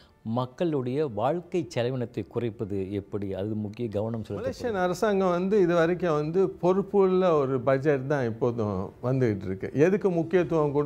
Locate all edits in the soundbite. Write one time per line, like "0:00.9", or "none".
0:04.7